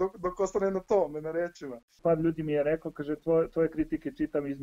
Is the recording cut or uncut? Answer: cut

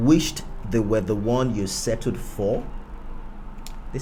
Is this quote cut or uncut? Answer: uncut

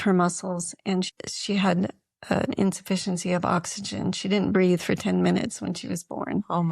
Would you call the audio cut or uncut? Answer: cut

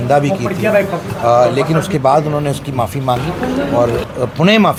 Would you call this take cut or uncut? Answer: uncut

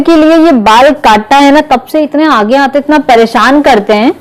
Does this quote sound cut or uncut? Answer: uncut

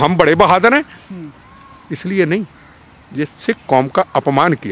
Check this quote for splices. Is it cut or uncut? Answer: uncut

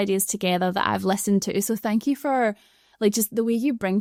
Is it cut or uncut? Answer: uncut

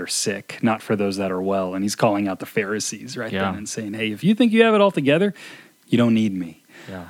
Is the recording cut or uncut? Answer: uncut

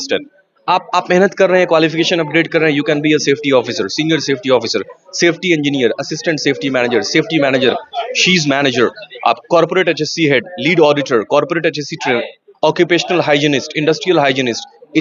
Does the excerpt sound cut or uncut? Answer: uncut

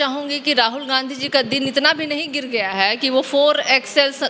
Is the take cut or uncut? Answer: uncut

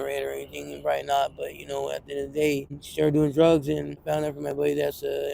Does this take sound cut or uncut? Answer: cut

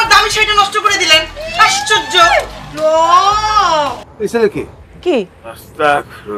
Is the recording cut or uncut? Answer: cut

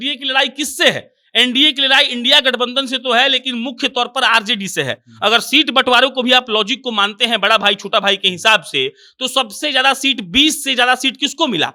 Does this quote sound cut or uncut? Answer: uncut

